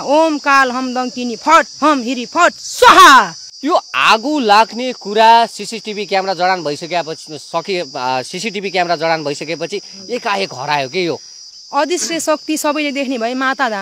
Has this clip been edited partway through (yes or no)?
yes